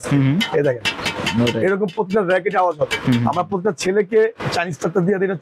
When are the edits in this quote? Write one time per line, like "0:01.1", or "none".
none